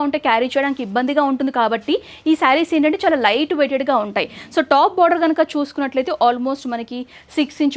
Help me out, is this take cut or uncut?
uncut